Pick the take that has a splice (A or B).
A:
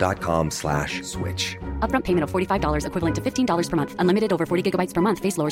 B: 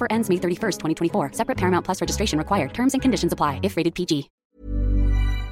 B